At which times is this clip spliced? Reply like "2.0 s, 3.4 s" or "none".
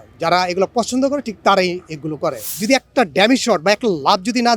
2.5 s

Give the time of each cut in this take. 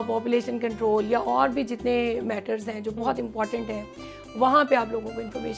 none

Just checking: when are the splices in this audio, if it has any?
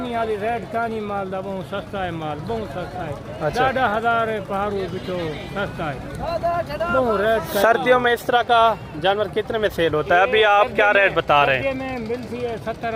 none

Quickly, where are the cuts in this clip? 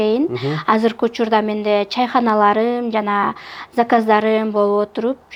none

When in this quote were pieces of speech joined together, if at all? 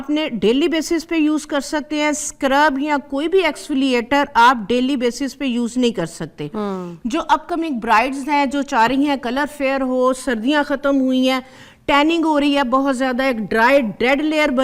none

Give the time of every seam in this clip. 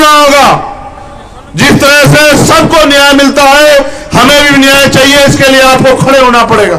none

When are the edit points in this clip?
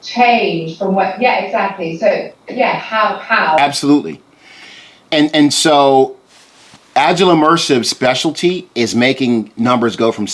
3.6 s

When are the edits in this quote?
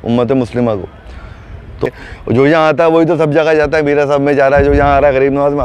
1.9 s

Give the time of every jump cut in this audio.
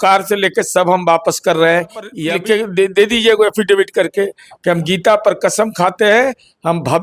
2.2 s

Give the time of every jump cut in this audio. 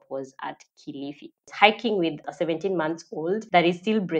1.5 s, 2.3 s, 3.4 s

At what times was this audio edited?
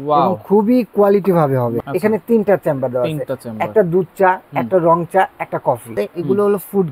1.8 s, 5.9 s

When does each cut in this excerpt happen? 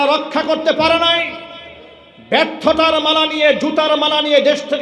none

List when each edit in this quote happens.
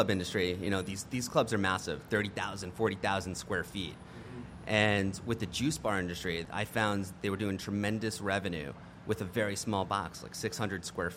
6.5 s

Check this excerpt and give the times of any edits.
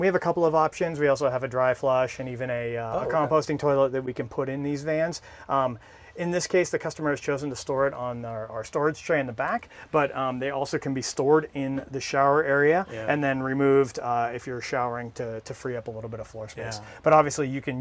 none

